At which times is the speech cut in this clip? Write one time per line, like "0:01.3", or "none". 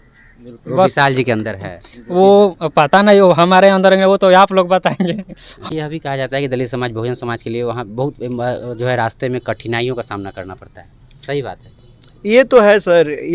0:05.7